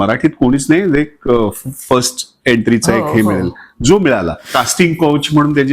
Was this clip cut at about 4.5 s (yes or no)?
yes